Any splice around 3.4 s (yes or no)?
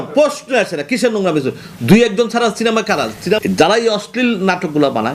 yes